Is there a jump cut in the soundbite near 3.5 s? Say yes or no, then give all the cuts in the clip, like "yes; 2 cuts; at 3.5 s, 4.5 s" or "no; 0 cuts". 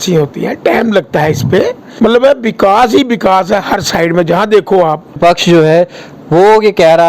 no; 2 cuts; at 1.8 s, 5.2 s